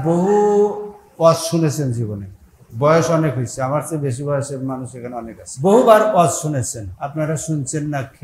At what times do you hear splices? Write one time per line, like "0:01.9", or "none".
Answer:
none